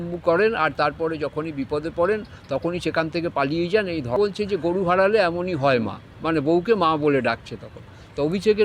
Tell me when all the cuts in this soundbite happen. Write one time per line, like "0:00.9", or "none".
0:04.1